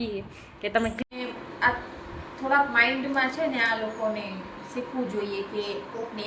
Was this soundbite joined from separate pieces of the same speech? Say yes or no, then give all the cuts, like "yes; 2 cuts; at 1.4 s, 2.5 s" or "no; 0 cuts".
yes; 1 cut; at 1.0 s